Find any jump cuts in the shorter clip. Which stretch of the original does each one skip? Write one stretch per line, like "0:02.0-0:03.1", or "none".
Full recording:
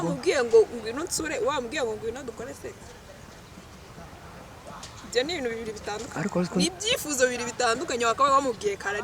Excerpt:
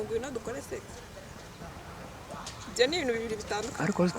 0:03.5-0:03.9